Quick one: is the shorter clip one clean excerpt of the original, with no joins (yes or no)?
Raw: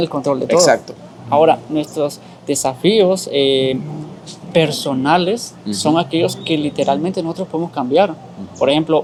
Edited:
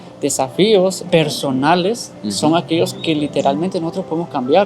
no